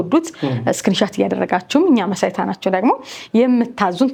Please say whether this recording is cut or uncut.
uncut